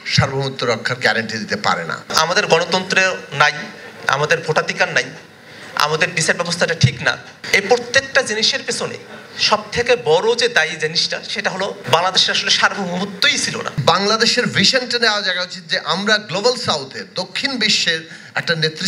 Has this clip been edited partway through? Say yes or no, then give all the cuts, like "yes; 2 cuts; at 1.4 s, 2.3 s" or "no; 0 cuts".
yes; 3 cuts; at 2.1 s, 7.3 s, 13.8 s